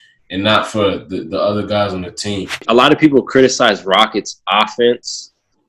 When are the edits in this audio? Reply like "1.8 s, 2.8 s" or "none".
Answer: 2.6 s